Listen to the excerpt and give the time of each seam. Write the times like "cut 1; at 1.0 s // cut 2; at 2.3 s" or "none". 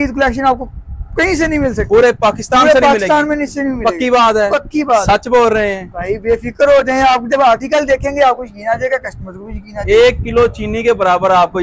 cut 1; at 9.7 s